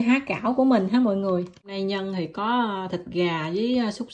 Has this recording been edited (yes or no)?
yes